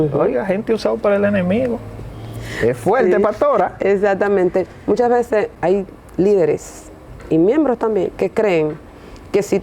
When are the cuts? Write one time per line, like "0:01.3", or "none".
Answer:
none